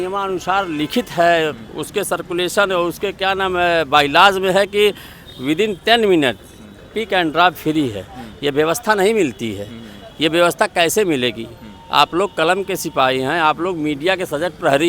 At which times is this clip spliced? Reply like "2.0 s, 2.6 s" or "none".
none